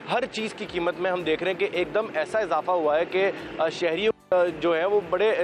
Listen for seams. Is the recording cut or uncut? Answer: uncut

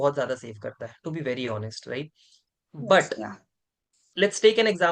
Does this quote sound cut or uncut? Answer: uncut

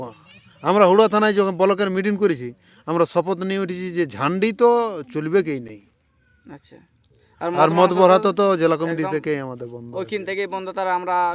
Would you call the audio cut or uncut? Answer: uncut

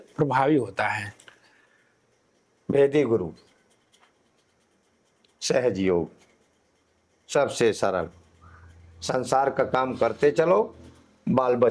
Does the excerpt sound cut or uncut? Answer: uncut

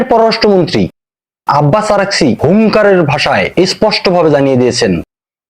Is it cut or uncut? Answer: cut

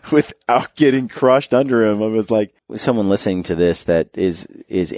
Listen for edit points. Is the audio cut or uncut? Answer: cut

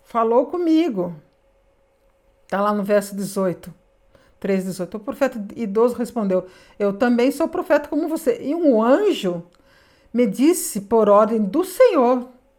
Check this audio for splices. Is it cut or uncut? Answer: uncut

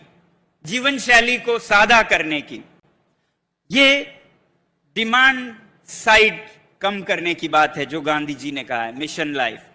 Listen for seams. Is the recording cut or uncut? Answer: uncut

